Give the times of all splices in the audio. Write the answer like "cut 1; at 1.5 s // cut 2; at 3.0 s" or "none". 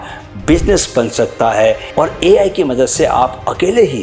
cut 1; at 1.8 s